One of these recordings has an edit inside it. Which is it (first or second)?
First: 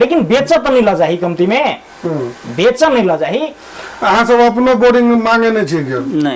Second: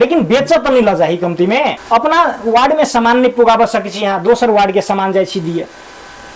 second